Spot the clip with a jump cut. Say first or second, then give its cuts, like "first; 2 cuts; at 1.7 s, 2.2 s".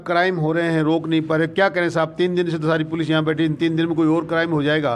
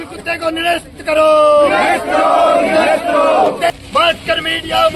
second; 1 cut; at 3.8 s